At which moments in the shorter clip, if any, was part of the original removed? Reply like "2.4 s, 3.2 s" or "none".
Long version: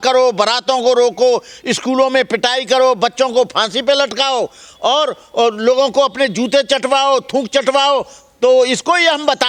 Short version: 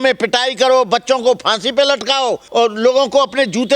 2.4 s